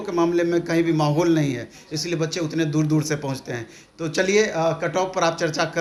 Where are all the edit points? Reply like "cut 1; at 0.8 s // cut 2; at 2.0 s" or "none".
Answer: none